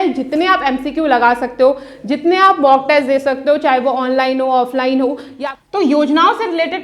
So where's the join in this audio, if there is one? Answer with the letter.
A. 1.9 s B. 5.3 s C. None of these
B